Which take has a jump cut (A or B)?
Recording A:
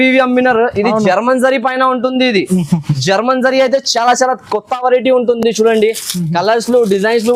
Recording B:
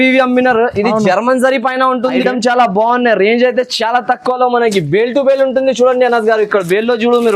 B